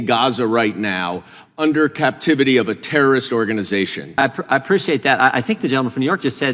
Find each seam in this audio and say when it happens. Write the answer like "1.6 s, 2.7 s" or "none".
4.2 s